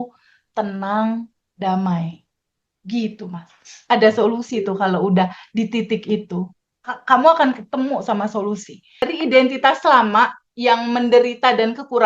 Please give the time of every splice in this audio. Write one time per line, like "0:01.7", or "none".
0:09.1